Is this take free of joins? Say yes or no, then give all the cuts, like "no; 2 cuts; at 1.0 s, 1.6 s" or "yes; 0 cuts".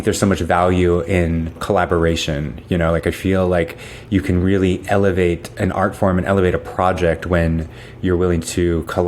no; 1 cut; at 1.6 s